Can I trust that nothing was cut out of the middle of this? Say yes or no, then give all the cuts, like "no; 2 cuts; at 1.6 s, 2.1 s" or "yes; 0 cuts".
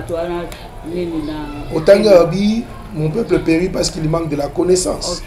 yes; 0 cuts